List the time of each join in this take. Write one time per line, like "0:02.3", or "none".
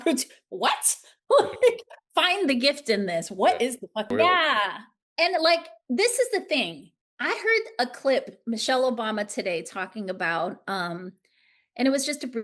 0:04.1